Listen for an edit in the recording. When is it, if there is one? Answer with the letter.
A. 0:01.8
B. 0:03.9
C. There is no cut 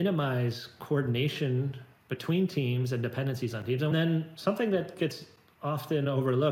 B